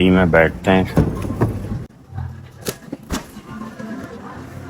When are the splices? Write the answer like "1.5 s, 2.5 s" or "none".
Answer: none